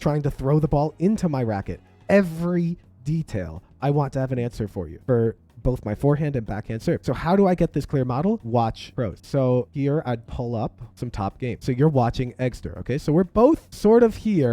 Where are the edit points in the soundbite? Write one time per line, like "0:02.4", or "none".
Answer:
none